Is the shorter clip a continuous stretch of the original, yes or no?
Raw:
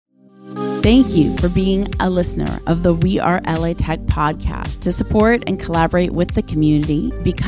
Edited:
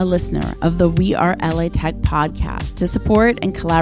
yes